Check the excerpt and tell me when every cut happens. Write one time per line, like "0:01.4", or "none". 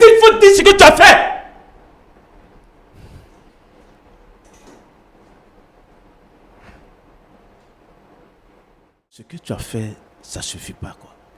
0:09.3